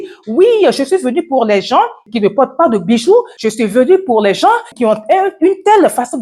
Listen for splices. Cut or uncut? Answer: cut